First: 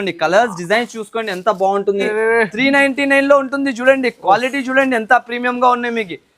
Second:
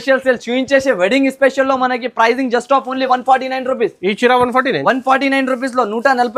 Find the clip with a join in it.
first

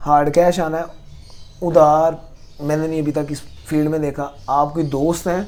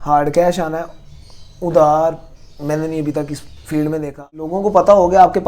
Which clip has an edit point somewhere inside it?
second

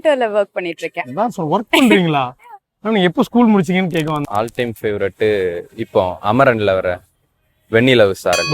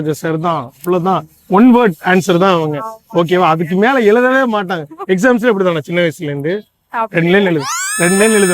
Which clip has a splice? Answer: first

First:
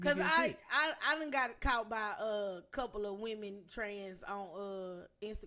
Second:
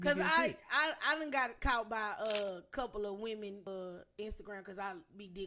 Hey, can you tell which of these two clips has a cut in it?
second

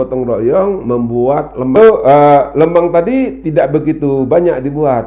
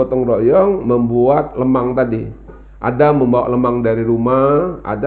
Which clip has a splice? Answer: first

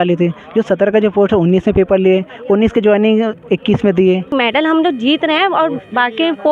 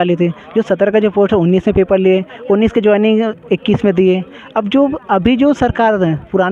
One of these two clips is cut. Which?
first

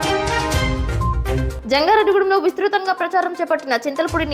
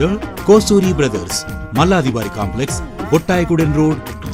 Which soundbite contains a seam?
first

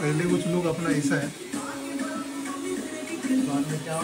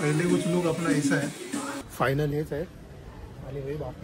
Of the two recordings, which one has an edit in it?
second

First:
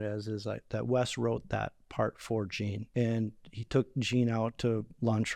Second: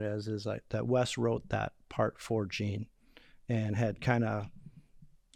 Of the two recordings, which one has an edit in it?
first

